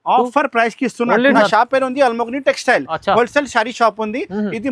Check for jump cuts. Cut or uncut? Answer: cut